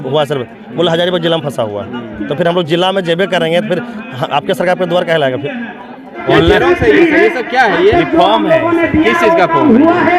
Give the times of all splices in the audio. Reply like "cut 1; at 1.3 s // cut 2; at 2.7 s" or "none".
cut 1; at 6.3 s

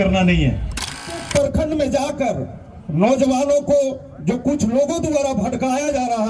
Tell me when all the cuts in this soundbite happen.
cut 1; at 1.0 s

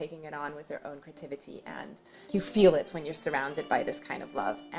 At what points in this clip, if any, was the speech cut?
cut 1; at 2.2 s

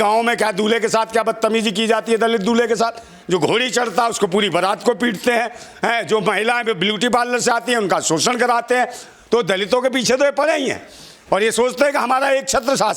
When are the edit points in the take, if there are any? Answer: cut 1; at 3.2 s

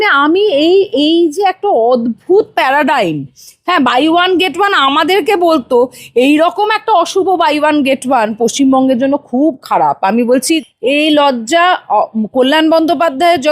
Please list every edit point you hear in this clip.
cut 1; at 10.6 s

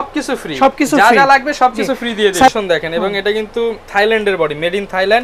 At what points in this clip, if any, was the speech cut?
cut 1; at 2.5 s

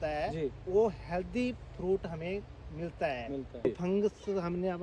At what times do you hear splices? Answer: cut 1; at 3.6 s

